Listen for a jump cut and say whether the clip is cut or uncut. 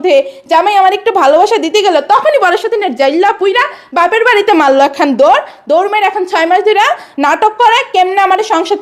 uncut